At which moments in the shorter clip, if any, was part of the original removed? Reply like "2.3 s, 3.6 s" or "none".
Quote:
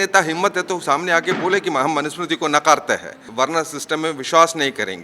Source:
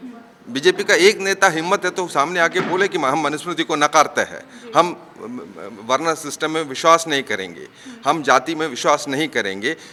3.2 s

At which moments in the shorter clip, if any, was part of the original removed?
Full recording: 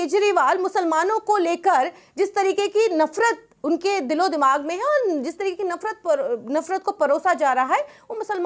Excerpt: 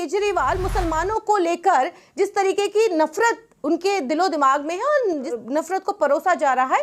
5.3 s

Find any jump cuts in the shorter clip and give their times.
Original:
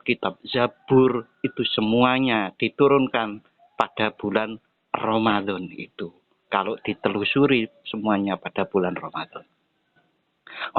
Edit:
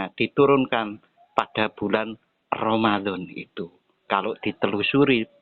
none

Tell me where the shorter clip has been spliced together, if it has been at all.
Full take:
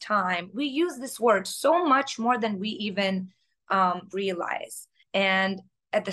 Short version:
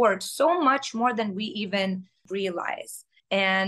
2.2 s

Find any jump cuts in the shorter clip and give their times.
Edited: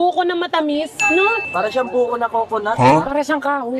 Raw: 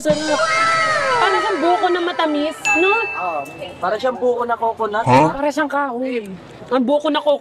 1.4 s

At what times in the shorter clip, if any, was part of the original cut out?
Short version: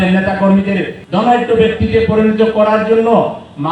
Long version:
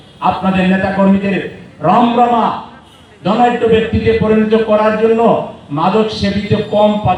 1.0 s

